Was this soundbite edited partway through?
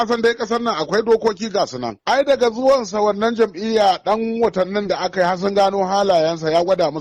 yes; 1 cut; at 1.9 s

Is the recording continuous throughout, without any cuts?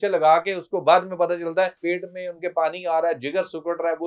no; 1 cut; at 1.8 s

